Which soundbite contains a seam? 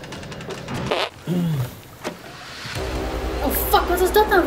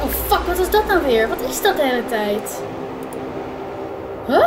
first; 1 cut; at 1.0 s

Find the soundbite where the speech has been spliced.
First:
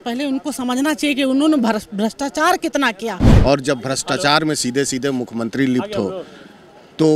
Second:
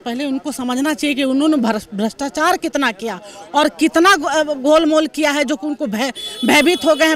first; 1 cut; at 3.3 s

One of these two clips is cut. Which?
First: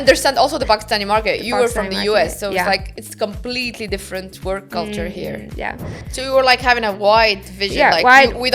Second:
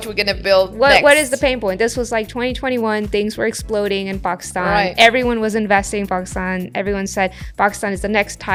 first; 1 cut; at 6.1 s

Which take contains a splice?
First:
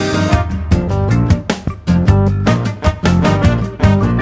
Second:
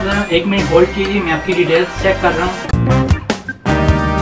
second; 1 cut; at 2.7 s

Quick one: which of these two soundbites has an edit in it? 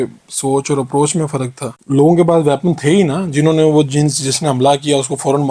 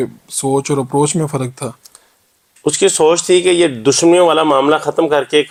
first; 1 cut; at 1.9 s

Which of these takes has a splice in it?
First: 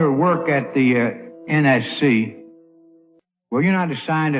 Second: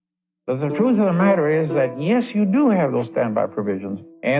second; 1 cut; at 1.0 s

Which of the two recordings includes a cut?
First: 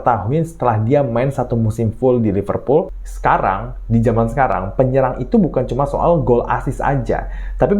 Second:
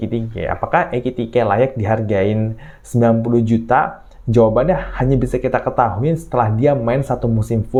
first; 1 cut; at 3.0 s

